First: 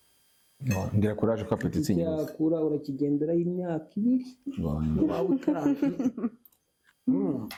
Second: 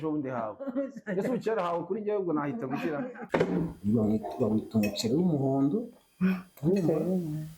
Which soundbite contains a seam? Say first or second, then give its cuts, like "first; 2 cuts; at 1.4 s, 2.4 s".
second; 1 cut; at 3.2 s